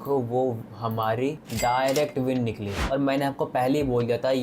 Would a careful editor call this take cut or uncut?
cut